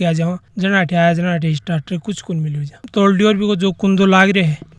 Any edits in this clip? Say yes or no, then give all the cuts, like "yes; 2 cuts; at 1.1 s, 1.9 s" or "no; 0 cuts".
yes; 1 cut; at 2.8 s